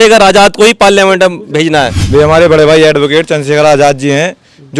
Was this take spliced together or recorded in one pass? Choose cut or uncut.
cut